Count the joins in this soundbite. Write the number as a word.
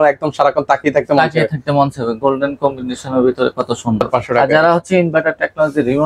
one